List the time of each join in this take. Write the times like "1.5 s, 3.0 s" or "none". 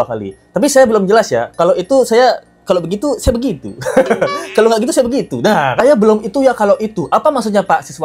none